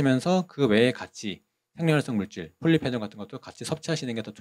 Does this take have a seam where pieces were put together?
no; 0 cuts

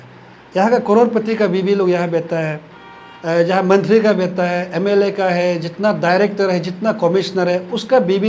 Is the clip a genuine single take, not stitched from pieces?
yes; 0 cuts

